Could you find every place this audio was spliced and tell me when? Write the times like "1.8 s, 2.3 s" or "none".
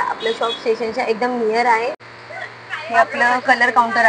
2.1 s